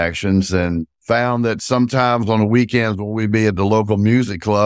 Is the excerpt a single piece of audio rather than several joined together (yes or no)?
no